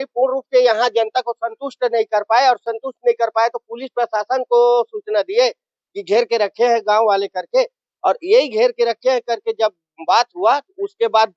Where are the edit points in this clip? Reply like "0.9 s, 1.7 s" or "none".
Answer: none